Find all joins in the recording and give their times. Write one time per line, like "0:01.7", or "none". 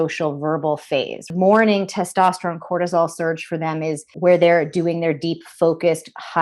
0:01.3
0:04.1